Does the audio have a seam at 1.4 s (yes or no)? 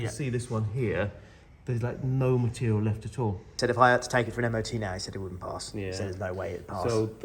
no